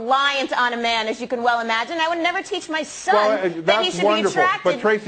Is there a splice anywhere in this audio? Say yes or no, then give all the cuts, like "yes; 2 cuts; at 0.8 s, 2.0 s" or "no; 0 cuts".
no; 0 cuts